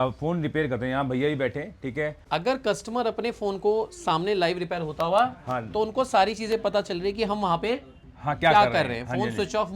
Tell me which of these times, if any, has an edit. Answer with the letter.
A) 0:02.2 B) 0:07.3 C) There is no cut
A